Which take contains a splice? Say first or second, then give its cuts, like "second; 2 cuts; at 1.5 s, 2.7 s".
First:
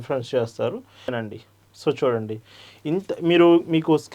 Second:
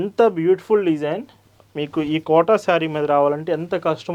first; 1 cut; at 1.2 s